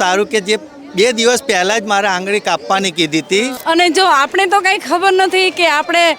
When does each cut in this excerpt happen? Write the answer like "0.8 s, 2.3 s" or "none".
3.6 s